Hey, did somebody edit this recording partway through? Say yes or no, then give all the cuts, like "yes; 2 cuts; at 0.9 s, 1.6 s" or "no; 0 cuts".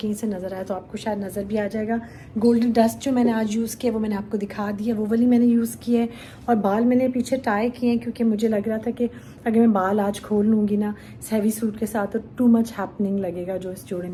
no; 0 cuts